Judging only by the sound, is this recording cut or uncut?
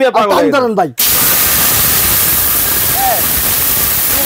cut